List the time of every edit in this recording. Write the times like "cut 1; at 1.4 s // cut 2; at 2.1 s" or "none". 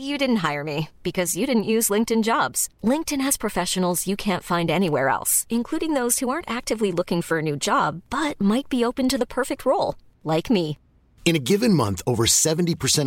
none